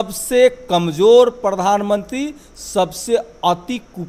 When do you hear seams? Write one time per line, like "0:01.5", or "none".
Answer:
none